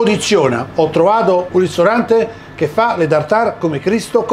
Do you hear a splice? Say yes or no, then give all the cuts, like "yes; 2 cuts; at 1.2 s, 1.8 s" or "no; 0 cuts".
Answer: yes; 1 cut; at 1.5 s